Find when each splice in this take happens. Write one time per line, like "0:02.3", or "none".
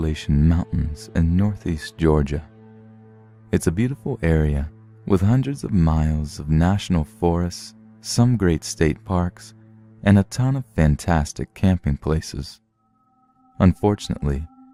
none